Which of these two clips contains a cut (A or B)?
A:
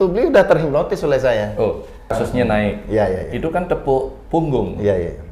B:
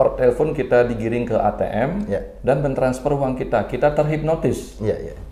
A